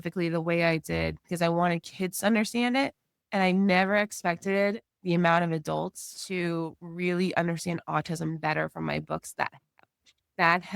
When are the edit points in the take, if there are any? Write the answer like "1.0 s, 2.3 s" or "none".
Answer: none